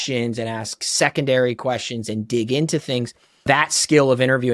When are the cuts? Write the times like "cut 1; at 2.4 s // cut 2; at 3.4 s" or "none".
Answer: cut 1; at 3.5 s